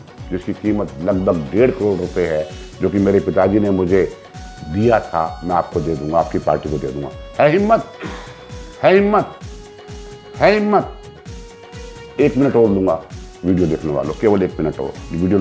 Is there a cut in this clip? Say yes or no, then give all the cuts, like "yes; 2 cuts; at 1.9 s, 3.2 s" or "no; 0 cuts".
no; 0 cuts